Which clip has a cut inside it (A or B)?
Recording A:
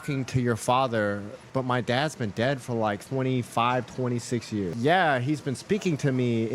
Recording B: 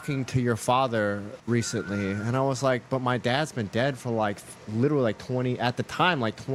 A